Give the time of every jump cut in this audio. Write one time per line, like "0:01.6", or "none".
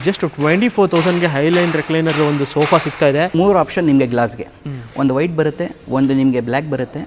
0:03.3